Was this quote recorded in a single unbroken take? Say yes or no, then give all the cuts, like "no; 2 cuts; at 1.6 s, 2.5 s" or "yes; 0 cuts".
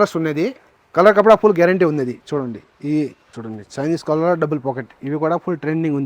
no; 1 cut; at 3.3 s